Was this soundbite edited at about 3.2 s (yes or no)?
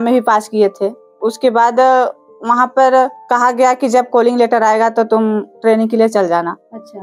yes